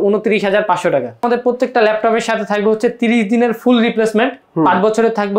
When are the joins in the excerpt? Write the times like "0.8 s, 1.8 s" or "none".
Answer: 1.2 s